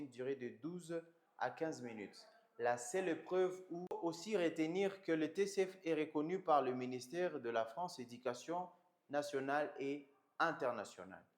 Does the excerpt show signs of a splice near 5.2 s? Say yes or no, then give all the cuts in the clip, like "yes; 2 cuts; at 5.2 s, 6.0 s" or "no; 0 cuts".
no; 1 cut; at 4.0 s